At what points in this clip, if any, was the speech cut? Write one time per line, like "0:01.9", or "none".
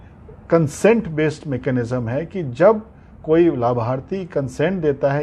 none